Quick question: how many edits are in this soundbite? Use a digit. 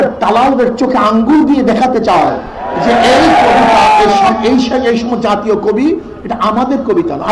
0